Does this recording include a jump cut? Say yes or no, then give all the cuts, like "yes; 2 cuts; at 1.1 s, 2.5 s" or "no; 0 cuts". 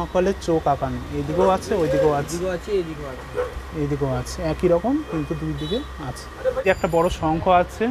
no; 0 cuts